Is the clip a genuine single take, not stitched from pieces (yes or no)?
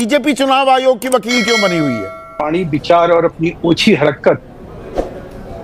no